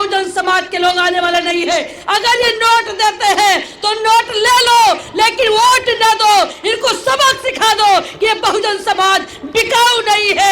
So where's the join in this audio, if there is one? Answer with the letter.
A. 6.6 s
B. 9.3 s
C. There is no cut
C